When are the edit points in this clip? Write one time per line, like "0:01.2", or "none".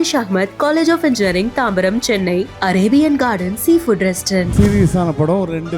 0:04.5